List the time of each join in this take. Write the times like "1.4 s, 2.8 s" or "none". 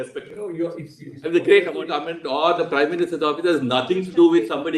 1.8 s